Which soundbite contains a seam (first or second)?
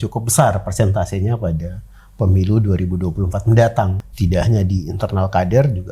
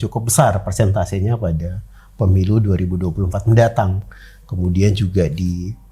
first